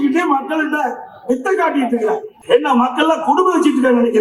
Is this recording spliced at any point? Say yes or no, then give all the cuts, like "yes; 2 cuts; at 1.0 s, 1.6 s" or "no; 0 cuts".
yes; 1 cut; at 2.3 s